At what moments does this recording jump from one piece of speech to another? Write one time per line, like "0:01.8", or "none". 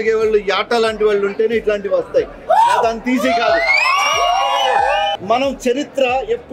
0:05.1